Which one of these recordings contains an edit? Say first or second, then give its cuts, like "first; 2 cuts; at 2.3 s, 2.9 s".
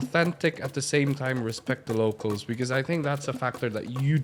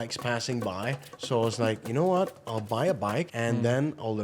second; 2 cuts; at 1.1 s, 3.3 s